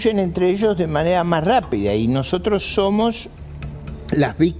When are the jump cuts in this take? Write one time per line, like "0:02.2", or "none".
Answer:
none